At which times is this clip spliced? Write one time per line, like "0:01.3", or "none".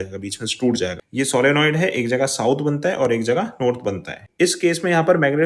0:01.0
0:04.2